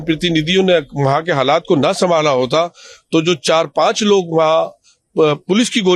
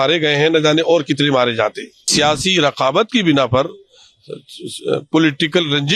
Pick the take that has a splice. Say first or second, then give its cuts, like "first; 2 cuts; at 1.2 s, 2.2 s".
second; 1 cut; at 2.1 s